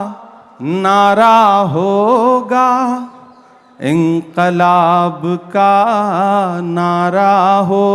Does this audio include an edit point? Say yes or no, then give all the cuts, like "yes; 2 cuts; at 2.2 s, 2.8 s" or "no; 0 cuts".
no; 0 cuts